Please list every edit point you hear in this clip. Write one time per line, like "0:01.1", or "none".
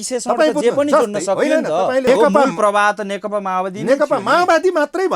0:02.1